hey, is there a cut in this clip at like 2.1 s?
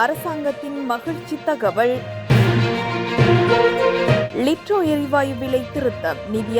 no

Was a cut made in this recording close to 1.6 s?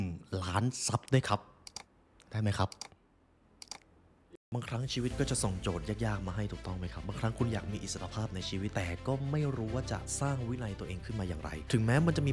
no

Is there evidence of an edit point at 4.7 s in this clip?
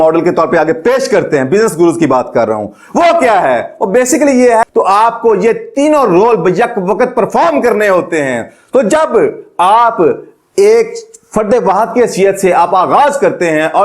yes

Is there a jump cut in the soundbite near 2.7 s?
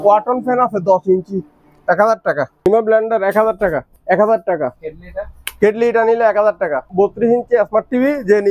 yes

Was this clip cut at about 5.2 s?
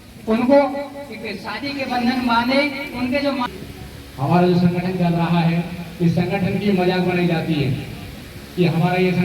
no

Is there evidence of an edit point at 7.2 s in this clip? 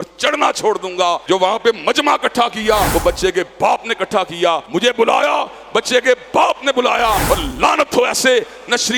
yes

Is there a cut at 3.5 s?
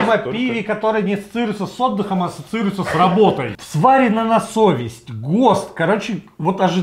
yes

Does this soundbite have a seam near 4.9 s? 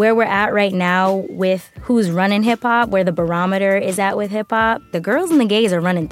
yes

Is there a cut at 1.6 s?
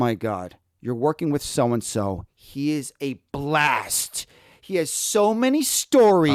no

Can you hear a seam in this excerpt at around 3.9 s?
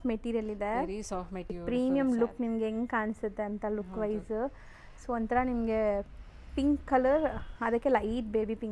no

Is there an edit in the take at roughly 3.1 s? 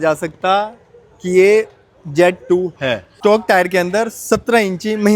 yes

